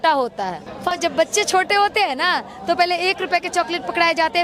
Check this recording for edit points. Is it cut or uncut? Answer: cut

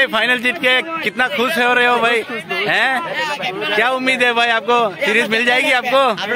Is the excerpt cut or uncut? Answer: uncut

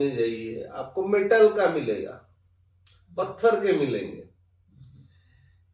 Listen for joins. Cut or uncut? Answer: uncut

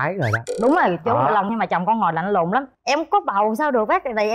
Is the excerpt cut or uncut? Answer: cut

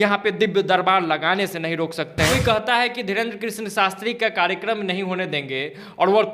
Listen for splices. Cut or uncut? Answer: cut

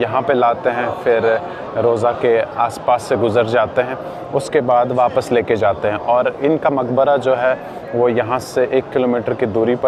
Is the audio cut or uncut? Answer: uncut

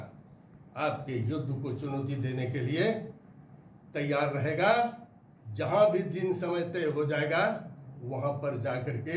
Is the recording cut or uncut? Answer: uncut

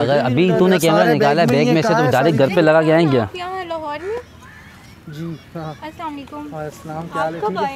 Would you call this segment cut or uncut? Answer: cut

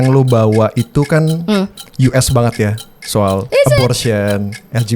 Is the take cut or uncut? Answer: cut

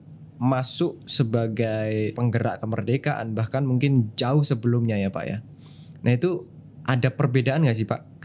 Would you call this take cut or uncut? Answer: cut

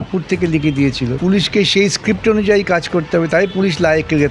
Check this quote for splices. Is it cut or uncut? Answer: cut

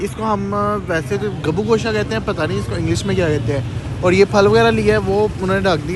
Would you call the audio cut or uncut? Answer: uncut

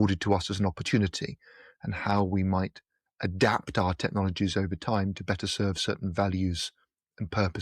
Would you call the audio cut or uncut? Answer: uncut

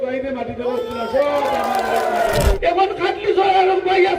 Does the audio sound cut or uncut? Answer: cut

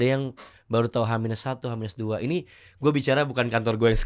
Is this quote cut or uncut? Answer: uncut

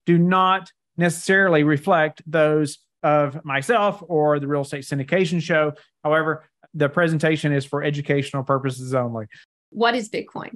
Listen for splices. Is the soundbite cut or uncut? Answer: cut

